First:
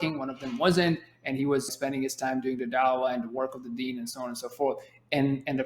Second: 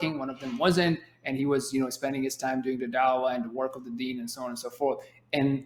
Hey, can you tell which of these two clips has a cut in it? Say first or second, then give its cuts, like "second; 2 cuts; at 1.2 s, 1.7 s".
first; 1 cut; at 1.7 s